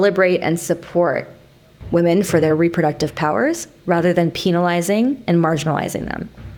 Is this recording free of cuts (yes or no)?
yes